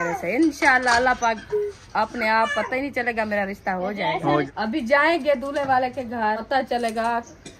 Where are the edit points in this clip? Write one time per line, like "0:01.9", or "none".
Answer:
0:04.5
0:06.4